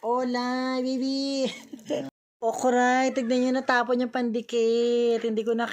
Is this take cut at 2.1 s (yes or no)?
yes